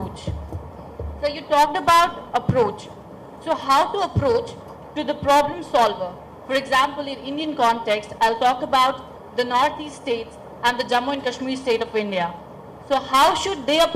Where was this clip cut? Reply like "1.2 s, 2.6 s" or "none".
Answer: 12.8 s